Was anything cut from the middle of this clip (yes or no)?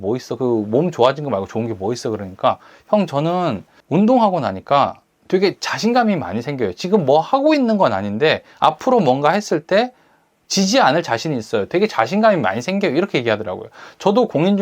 yes